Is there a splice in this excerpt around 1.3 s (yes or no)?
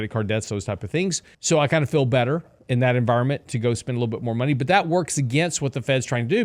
yes